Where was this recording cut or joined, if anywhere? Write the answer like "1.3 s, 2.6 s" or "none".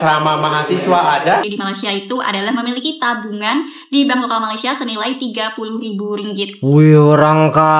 1.5 s